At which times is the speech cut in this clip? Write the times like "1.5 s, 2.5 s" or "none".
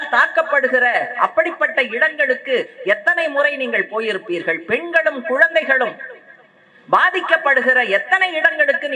none